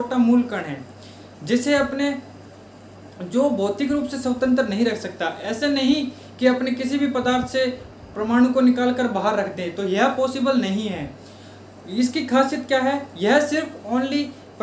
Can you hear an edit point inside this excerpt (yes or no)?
no